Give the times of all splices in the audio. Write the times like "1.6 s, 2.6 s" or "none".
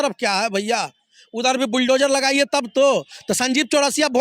none